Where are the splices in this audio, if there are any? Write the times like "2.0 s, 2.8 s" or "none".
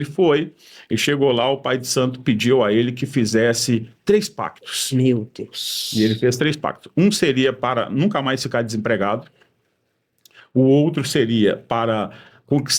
none